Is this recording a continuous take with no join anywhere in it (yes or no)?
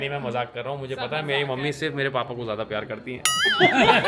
yes